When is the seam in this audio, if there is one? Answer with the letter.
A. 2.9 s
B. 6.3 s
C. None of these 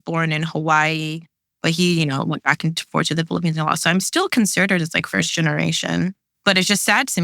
B